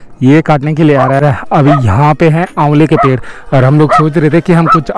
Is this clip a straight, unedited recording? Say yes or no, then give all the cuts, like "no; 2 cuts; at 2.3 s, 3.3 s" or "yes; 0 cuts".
no; 1 cut; at 1.2 s